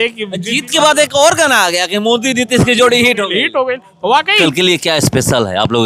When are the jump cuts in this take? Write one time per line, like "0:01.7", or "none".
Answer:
0:04.4